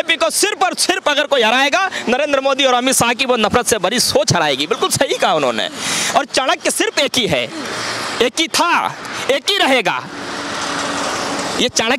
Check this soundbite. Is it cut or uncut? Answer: uncut